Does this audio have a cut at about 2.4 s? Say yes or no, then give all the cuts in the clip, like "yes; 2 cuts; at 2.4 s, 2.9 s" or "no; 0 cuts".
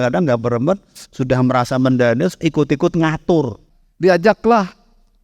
no; 1 cut; at 3.6 s